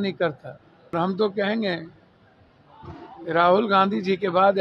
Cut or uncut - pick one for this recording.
cut